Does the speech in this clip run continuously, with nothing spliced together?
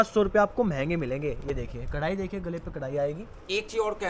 yes; 0 cuts

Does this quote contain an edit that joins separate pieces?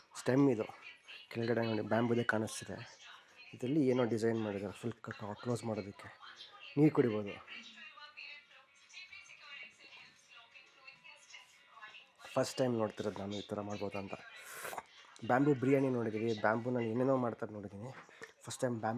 no; 0 cuts

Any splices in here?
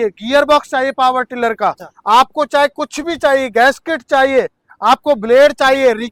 no; 0 cuts

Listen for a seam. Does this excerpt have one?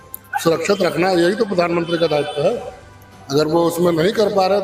no; 0 cuts

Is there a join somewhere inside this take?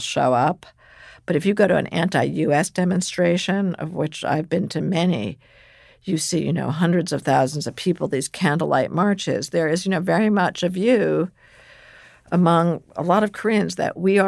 no; 0 cuts

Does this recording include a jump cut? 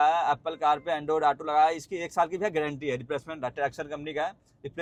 no; 0 cuts

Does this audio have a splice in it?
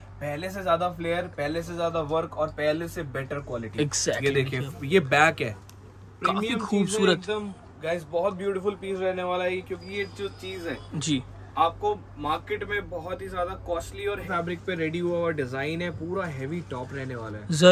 yes; 2 cuts; at 5.6 s, 14.2 s

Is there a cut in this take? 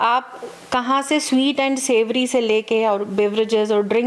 no; 0 cuts

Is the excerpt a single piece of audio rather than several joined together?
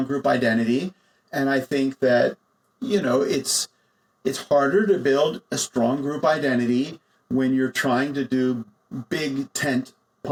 yes; 0 cuts

